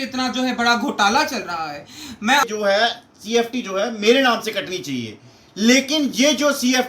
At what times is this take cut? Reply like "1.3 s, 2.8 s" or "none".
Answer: 2.4 s